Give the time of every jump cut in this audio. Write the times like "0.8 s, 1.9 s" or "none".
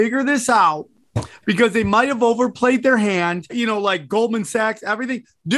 3.5 s